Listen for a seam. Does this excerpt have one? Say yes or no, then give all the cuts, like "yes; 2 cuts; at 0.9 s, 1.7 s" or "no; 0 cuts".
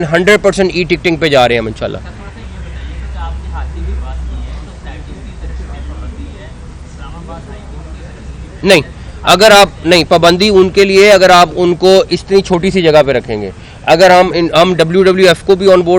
no; 0 cuts